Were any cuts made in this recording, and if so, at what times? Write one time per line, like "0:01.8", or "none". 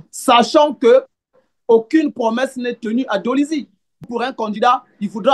0:04.1